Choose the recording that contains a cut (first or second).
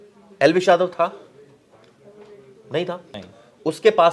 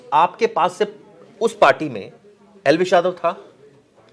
first